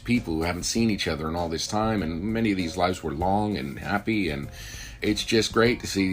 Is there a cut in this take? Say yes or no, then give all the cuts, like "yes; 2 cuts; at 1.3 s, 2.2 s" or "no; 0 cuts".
yes; 1 cut; at 5.0 s